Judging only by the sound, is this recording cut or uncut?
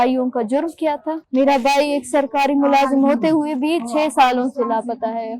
cut